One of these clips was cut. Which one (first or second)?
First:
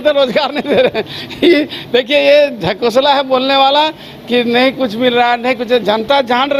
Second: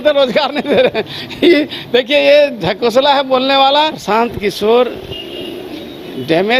second